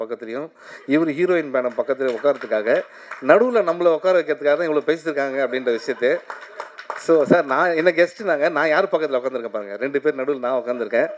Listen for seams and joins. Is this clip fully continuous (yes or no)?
yes